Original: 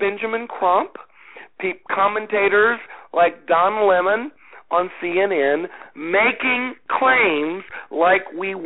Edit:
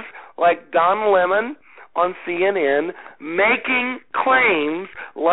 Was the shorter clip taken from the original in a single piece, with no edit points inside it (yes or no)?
yes